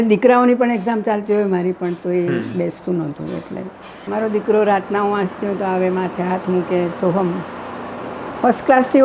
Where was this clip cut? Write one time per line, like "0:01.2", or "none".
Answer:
0:04.1